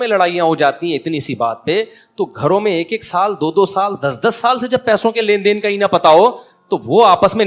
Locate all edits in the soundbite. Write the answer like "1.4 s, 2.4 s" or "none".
none